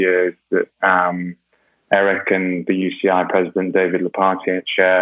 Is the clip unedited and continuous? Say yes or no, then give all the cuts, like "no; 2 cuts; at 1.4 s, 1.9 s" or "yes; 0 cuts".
yes; 0 cuts